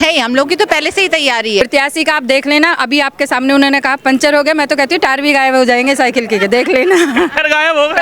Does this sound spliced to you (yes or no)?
yes